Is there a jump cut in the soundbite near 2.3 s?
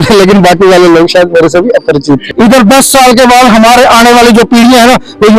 yes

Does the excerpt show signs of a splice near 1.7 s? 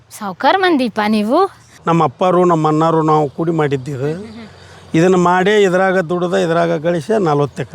yes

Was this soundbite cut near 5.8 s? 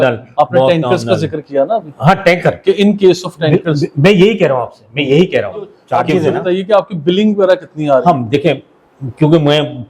yes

